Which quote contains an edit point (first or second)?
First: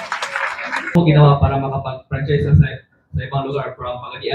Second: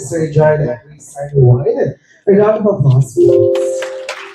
first